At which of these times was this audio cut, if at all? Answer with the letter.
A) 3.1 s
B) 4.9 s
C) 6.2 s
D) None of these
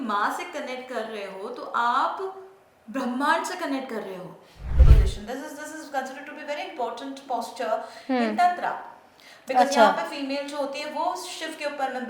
B